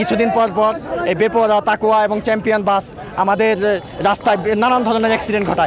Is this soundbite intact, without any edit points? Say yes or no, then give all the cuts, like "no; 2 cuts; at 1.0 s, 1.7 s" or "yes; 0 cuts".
yes; 0 cuts